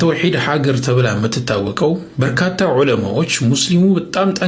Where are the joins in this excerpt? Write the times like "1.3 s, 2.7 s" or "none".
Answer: none